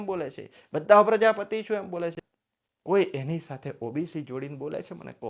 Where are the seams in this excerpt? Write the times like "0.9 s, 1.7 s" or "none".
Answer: 2.2 s